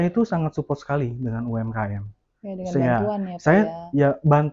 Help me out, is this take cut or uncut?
uncut